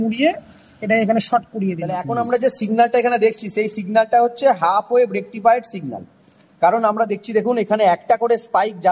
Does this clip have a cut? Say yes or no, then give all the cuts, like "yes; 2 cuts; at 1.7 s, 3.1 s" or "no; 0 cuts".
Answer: yes; 1 cut; at 2.1 s